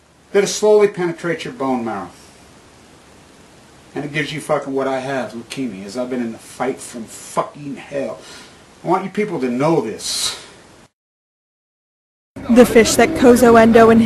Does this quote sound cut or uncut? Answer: uncut